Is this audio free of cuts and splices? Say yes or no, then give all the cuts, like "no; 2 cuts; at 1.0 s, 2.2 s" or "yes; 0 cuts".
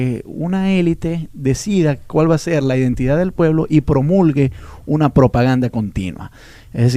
yes; 0 cuts